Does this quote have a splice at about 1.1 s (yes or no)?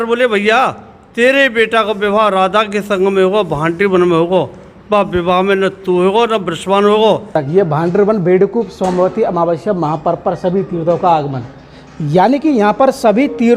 no